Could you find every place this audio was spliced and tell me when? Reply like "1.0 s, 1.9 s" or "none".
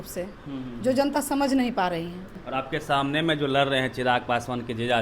2.3 s